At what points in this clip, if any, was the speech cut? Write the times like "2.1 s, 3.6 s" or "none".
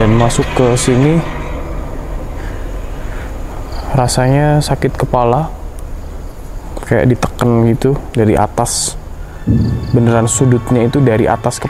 none